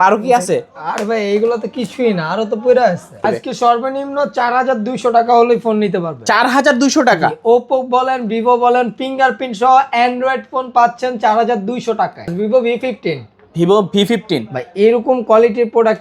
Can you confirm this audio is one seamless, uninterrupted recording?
no; 2 cuts; at 3.2 s, 12.3 s

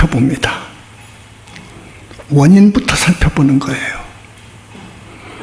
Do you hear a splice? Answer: yes; 1 cut; at 4.3 s

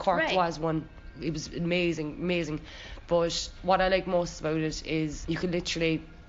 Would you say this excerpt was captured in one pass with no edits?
yes; 0 cuts

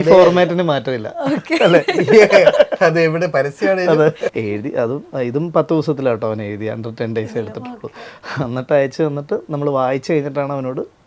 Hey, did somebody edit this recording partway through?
yes; 1 cut; at 4.3 s

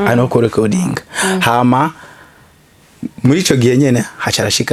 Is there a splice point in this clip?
no; 0 cuts

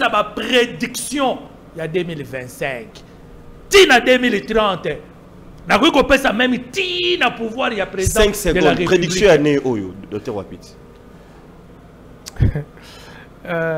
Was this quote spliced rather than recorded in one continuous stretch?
no; 0 cuts

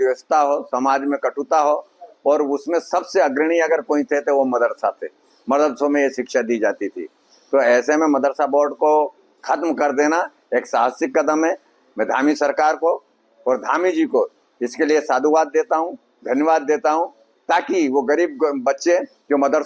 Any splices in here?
no; 0 cuts

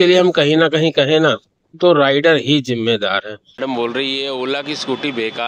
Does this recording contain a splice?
yes; 1 cut; at 3.6 s

